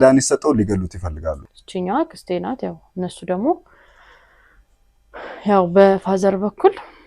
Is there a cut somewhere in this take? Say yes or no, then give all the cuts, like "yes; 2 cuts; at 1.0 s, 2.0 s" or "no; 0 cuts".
yes; 1 cut; at 1.4 s